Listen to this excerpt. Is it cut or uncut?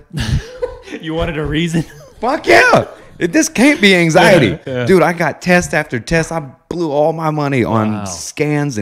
uncut